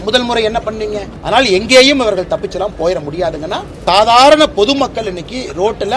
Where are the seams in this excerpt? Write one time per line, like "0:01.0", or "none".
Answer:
0:01.1
0:03.7